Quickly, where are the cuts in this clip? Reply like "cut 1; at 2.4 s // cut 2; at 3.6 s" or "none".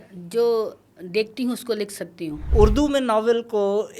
cut 1; at 2.4 s